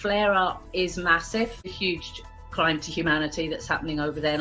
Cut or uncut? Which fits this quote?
cut